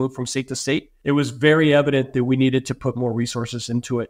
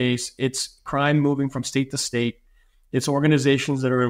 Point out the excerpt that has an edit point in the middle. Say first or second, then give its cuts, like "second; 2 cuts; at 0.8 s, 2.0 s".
first; 1 cut; at 0.9 s